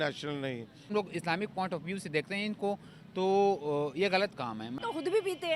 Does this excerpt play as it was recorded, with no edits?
no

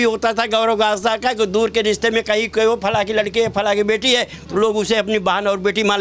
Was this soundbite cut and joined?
no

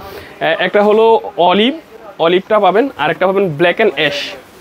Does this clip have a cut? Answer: no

